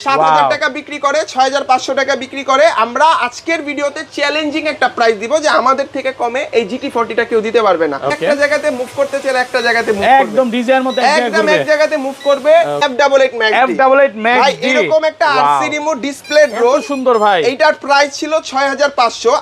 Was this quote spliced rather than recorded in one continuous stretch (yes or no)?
yes